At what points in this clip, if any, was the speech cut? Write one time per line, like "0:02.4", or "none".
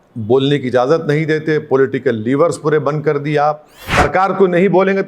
0:03.7